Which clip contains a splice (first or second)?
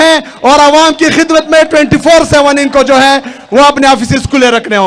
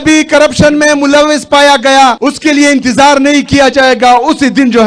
second